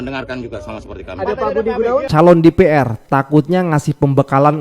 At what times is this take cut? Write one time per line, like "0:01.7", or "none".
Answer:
0:02.1